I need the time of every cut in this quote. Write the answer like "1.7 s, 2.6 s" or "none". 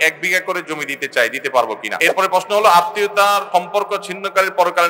1.9 s, 3.5 s